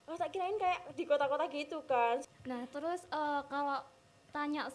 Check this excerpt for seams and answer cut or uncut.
cut